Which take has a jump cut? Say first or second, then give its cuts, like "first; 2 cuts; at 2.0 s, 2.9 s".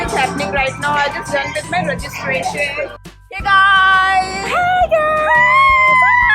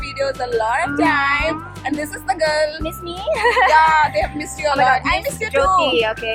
first; 1 cut; at 3.1 s